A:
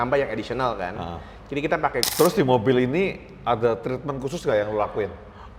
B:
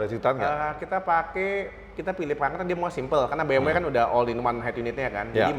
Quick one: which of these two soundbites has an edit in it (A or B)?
A